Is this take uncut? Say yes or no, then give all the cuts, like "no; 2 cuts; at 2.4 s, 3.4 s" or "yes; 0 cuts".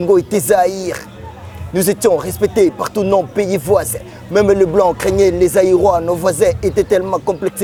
yes; 0 cuts